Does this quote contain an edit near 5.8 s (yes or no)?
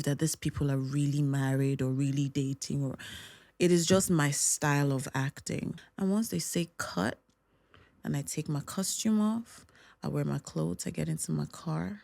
yes